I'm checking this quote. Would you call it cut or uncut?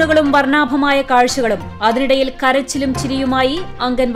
uncut